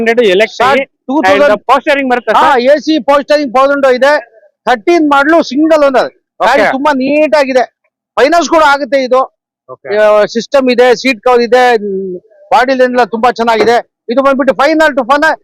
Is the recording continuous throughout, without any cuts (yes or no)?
yes